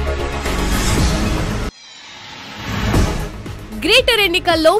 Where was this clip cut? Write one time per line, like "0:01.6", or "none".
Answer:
0:01.5
0:02.9